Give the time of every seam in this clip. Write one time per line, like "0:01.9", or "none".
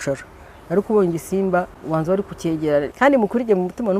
0:01.8
0:02.9